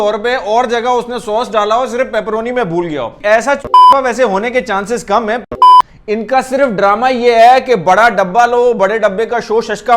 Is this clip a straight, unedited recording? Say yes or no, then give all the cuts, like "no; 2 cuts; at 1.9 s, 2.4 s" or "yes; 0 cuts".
no; 1 cut; at 5.6 s